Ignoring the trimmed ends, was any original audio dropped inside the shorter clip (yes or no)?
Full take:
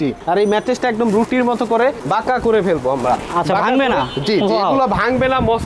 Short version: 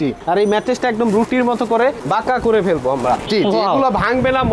yes